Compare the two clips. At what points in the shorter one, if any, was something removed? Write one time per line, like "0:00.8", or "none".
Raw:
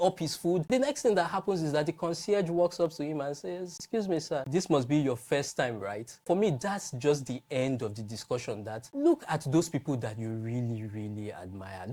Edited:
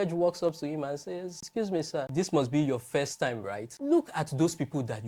0:03.7